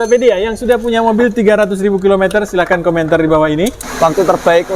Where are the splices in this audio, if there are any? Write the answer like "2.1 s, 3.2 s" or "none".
3.8 s